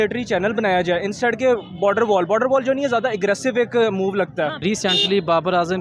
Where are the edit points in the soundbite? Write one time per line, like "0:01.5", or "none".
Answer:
0:04.6